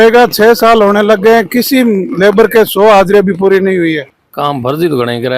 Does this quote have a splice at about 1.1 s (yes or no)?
no